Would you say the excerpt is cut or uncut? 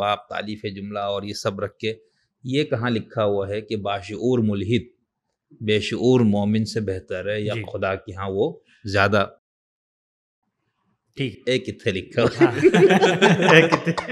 uncut